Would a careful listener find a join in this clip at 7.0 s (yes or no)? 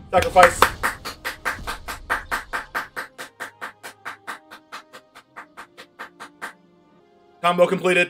yes